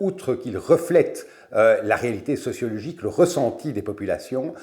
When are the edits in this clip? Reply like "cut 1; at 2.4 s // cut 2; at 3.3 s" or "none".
none